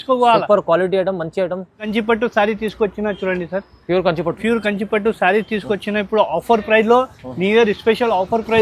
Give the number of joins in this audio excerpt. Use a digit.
1